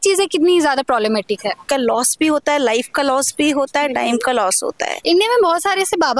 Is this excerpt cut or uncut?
cut